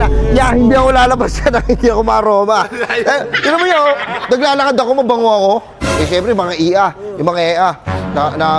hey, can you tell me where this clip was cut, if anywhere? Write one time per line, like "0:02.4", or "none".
none